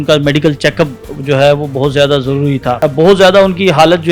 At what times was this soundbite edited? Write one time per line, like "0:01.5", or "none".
0:02.8